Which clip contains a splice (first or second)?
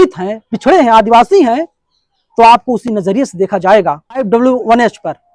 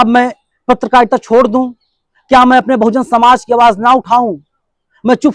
first